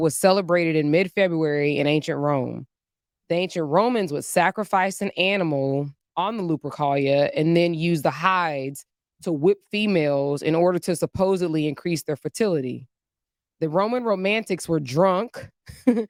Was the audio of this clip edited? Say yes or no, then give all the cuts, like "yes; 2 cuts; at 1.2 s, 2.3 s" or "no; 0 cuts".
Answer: no; 0 cuts